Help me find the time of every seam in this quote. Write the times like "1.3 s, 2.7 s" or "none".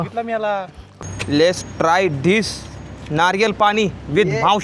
0.9 s